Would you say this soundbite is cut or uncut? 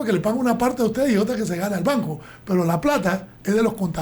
uncut